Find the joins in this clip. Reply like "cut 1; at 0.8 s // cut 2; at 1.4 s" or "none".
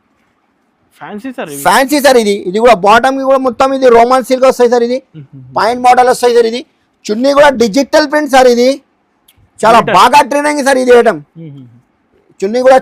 none